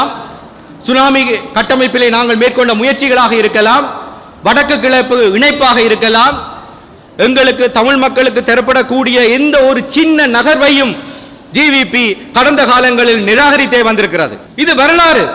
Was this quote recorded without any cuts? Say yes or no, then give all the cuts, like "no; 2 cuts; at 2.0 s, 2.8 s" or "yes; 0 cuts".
no; 1 cut; at 14.4 s